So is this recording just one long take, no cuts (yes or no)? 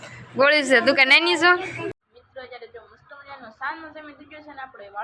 no